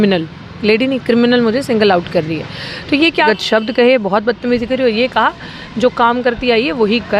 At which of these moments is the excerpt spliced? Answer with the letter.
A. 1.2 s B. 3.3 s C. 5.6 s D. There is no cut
B